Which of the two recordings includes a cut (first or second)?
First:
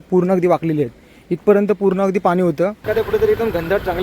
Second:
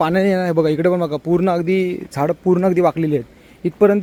first